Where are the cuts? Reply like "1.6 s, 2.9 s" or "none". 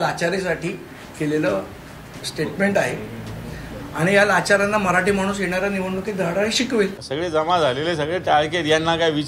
7.0 s